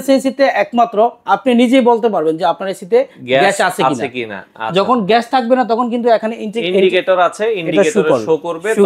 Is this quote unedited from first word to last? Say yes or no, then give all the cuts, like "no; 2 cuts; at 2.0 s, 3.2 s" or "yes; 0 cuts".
yes; 0 cuts